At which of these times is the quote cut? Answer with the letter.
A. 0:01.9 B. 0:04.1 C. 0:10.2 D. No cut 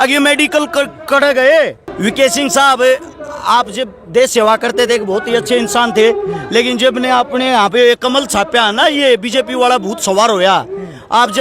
A